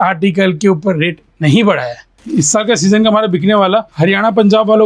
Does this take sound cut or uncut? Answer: cut